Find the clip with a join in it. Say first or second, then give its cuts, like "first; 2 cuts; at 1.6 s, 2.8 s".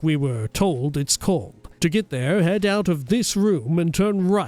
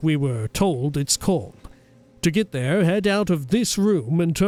first; 1 cut; at 1.6 s